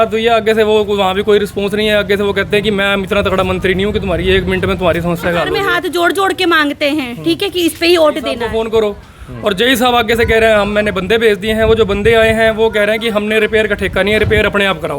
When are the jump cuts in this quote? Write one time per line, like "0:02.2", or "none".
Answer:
0:05.6
0:08.4